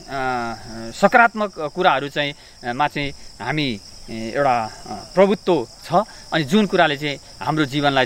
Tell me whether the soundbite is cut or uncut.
uncut